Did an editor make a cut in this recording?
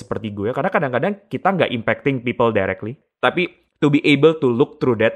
yes; 1 cut; at 3.1 s

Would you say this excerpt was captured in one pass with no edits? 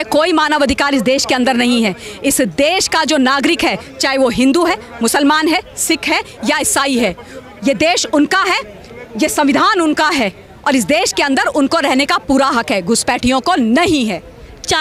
yes; 0 cuts

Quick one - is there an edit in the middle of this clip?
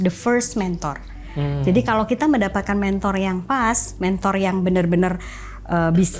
no; 0 cuts

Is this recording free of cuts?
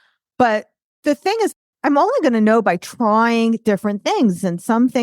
no; 1 cut; at 1.6 s

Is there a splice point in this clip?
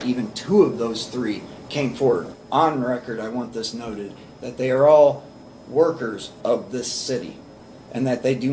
yes; 1 cut; at 2.3 s

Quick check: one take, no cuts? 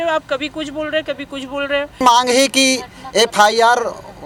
yes; 0 cuts

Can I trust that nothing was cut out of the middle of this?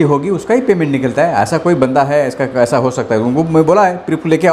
yes; 0 cuts

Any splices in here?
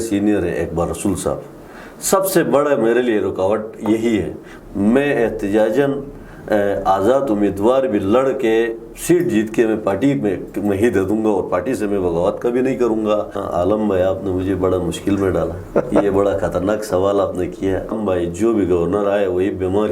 yes; 3 cuts; at 4.4 s, 13.4 s, 18.0 s

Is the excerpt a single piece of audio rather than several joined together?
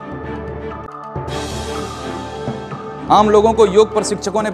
no; 2 cuts; at 0.9 s, 2.9 s

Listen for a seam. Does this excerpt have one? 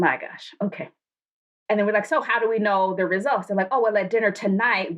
yes; 1 cut; at 1.0 s

